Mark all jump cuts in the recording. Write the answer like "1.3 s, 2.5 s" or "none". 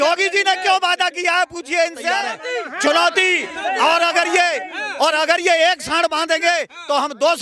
2.4 s